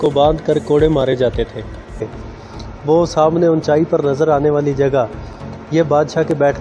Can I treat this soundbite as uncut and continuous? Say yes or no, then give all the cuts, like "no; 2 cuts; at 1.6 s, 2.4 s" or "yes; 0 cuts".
no; 1 cut; at 2.2 s